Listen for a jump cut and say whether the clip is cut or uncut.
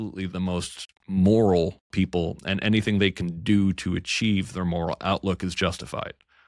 uncut